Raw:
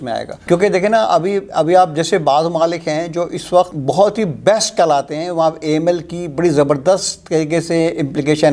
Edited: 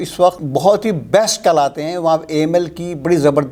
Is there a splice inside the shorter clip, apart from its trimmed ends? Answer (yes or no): no